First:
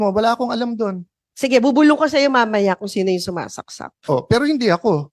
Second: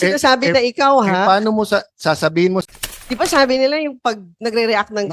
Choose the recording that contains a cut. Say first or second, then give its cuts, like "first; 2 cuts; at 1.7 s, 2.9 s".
second; 1 cut; at 2.6 s